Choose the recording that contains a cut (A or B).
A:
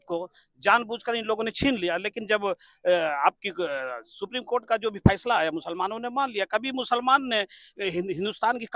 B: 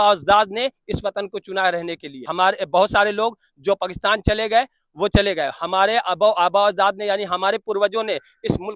B